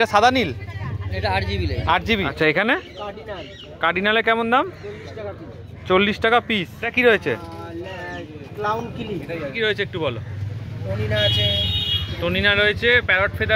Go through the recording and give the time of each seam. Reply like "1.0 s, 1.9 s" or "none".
2.3 s, 6.8 s, 9.5 s